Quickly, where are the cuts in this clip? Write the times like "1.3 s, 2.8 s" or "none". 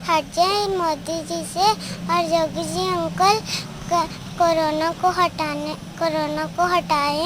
none

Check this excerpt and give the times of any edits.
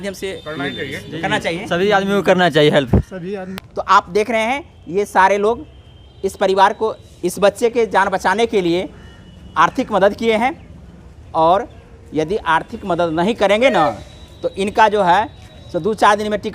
3.6 s

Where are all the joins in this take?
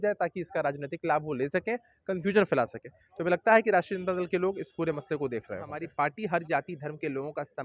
5.8 s

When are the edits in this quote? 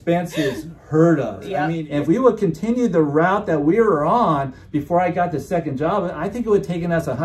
1.8 s

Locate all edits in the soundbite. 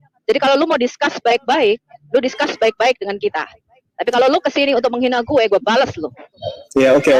none

